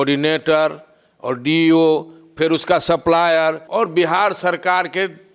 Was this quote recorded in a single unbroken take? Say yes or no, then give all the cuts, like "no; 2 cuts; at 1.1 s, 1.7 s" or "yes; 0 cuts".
no; 1 cut; at 3.6 s